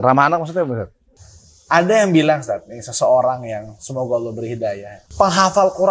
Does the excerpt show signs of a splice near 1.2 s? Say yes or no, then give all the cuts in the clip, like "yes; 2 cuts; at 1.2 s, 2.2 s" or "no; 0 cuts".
yes; 2 cuts; at 1.2 s, 5.0 s